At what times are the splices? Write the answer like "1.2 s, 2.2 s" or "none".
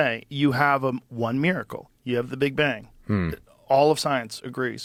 none